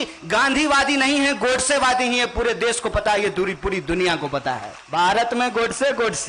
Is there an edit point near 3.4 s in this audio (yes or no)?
no